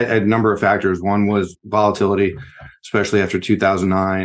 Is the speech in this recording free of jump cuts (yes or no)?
yes